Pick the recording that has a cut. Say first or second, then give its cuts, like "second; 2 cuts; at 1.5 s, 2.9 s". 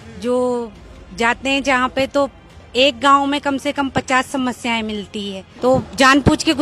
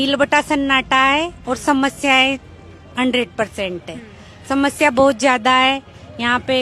first; 1 cut; at 5.4 s